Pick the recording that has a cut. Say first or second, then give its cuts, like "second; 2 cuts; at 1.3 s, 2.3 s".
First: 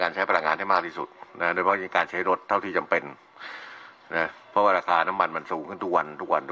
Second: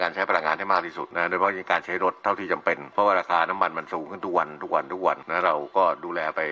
second; 3 cuts; at 1.0 s, 2.8 s, 5.2 s